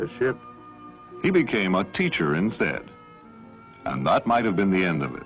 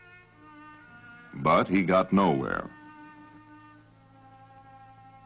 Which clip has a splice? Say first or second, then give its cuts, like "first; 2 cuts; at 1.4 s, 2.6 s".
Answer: second; 1 cut; at 1.4 s